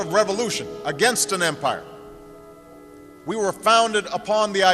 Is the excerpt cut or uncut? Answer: uncut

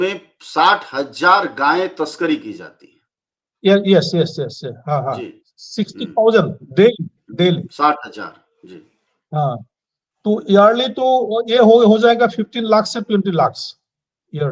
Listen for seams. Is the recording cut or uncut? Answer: uncut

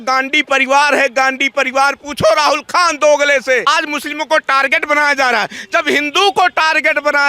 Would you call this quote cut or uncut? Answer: cut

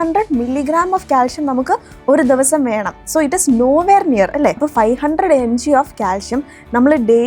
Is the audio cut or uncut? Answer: cut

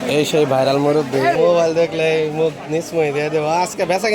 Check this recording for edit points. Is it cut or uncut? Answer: cut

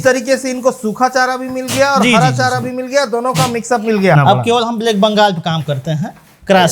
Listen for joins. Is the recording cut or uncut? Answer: cut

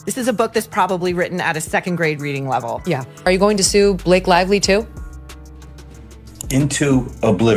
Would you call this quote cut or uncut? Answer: cut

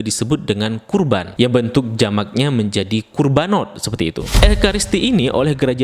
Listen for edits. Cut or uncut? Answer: cut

